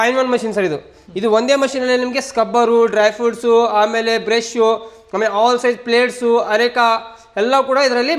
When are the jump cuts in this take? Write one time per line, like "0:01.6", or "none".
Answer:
none